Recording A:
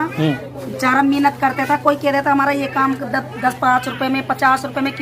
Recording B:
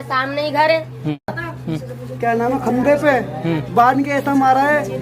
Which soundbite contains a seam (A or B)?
B